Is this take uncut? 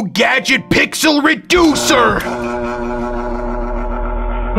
yes; 0 cuts

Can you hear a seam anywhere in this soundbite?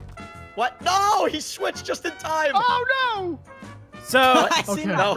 yes; 1 cut; at 3.5 s

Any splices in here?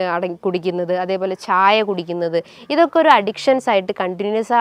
no; 0 cuts

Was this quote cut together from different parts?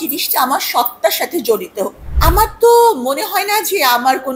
yes; 1 cut; at 2.1 s

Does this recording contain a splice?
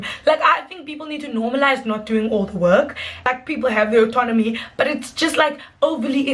yes; 1 cut; at 3.2 s

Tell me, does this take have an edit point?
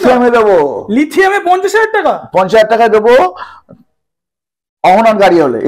no; 0 cuts

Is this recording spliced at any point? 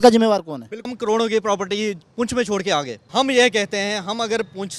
yes; 2 cuts; at 0.9 s, 3.0 s

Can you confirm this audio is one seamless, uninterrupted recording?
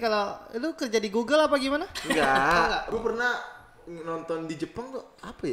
no; 1 cut; at 2.9 s

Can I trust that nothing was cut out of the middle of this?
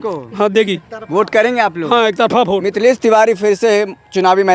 yes; 0 cuts

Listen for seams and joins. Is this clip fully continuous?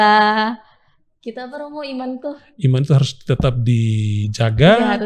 yes; 0 cuts

